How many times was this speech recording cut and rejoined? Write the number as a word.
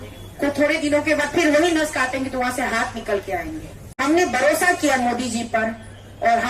one